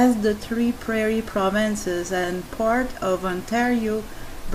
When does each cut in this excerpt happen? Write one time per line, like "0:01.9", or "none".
none